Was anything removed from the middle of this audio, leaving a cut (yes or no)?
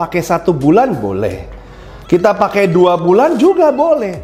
no